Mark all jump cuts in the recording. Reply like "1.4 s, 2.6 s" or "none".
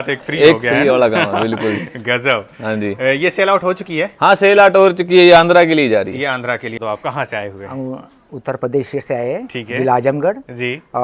6.8 s